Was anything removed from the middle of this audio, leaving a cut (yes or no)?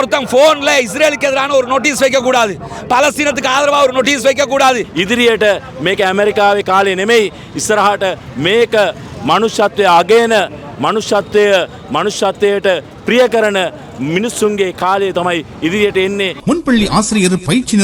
yes